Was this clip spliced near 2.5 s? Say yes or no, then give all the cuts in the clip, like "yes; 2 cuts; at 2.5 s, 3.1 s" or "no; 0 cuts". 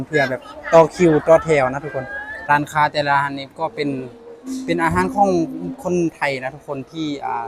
yes; 1 cut; at 2.5 s